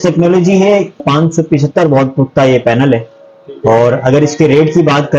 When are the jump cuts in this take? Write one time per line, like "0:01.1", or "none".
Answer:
0:01.0